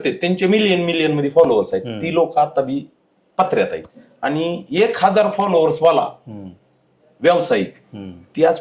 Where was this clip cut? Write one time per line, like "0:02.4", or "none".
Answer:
0:03.9